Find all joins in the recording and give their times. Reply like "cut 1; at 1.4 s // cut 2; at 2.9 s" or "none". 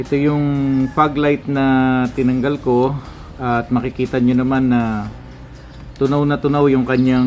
none